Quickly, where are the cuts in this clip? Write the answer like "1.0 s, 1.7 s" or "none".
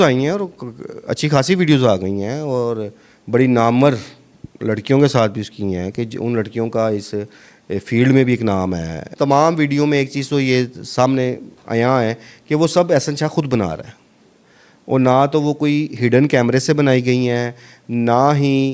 9.1 s